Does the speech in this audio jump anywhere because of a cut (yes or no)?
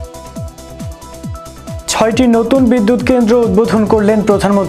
yes